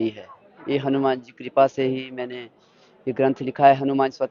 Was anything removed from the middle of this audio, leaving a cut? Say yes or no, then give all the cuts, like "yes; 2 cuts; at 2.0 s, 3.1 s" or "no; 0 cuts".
no; 0 cuts